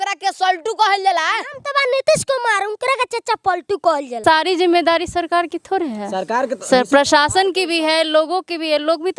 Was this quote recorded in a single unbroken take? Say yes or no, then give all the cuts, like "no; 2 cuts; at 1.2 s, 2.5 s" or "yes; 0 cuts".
no; 1 cut; at 4.1 s